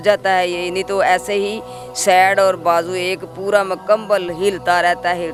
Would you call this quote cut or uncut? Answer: uncut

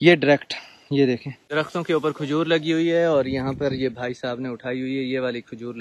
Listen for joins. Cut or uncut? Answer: cut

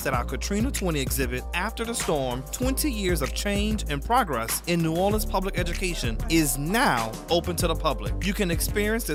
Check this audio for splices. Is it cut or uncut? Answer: uncut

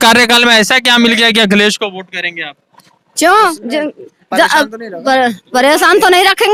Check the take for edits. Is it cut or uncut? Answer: uncut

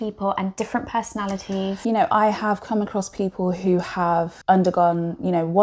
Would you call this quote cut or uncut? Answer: cut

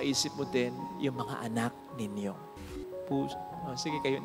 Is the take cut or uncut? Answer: cut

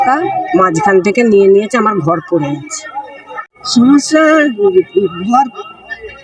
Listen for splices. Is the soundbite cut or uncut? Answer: uncut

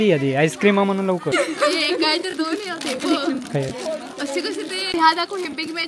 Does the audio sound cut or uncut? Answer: cut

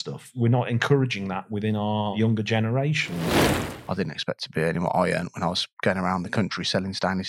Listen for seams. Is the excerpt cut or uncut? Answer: cut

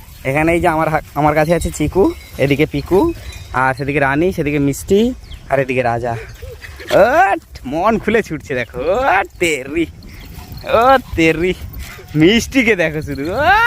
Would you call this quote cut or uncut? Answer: uncut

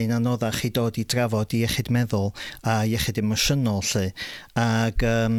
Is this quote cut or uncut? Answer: uncut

